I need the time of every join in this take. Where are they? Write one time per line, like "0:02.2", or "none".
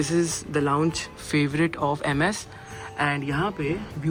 none

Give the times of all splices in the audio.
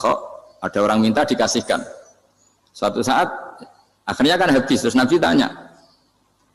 none

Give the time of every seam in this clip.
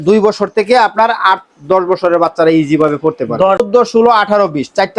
0:03.6

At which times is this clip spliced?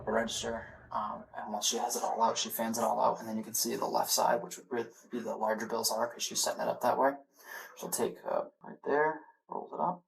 0:08.6

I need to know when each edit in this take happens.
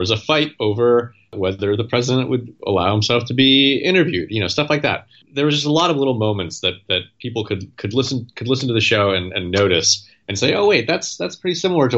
0:01.3
0:02.5
0:05.2

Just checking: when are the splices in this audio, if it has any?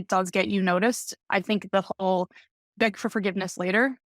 0:01.1

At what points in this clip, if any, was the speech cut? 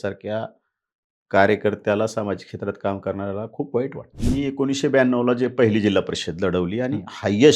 0:04.1

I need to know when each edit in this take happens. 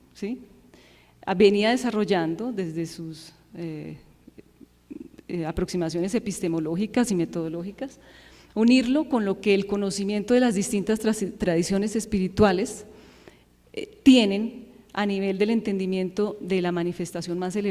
0:09.1

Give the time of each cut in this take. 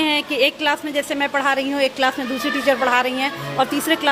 none

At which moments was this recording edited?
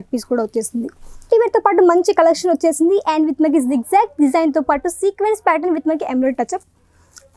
0:01.3

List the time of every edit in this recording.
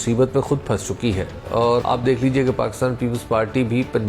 0:01.5

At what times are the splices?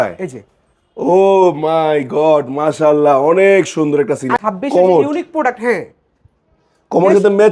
0:04.4

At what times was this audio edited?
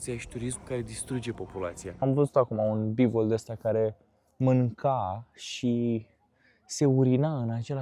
0:01.9

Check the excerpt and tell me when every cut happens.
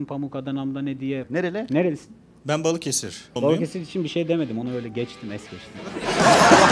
0:01.2
0:03.4

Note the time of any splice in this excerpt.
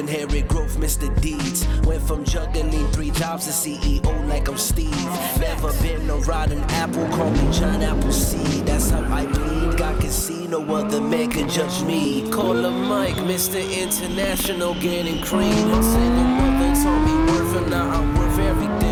none

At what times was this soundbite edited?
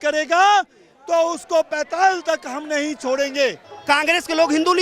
0:03.7

